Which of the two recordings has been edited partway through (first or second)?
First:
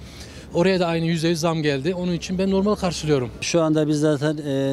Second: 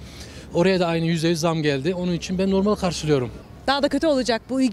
second